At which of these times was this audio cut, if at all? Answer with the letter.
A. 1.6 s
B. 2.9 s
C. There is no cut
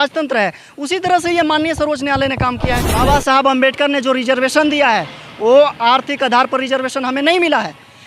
B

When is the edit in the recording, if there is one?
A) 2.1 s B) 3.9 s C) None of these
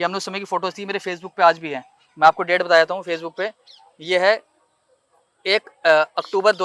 C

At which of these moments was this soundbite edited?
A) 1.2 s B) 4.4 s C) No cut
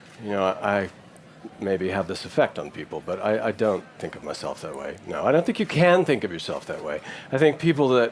A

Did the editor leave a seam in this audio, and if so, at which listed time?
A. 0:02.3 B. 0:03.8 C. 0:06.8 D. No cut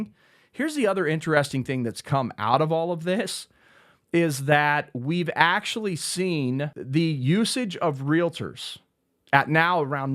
C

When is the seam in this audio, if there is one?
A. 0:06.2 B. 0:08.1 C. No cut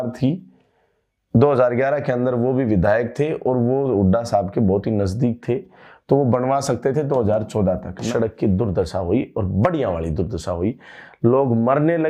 B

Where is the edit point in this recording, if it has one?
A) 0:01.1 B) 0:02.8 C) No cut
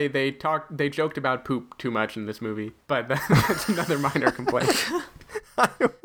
B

